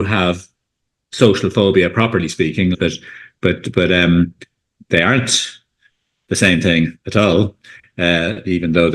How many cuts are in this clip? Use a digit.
1